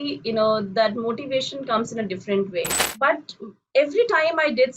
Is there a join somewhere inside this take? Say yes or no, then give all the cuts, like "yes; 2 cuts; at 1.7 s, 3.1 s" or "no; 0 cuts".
yes; 1 cut; at 2.8 s